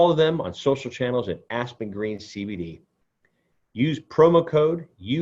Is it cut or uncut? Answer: uncut